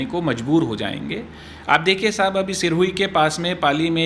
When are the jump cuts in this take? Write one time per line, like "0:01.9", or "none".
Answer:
none